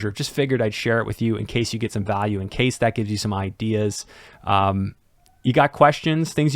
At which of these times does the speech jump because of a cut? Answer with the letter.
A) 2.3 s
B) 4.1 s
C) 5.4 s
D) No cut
D